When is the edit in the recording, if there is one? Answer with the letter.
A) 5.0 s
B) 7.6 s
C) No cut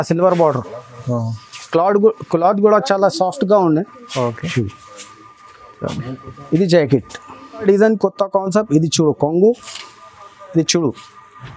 B